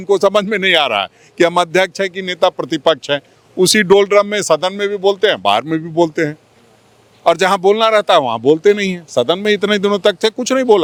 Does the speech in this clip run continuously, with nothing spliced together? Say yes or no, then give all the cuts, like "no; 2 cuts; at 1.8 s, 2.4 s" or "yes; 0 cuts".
yes; 0 cuts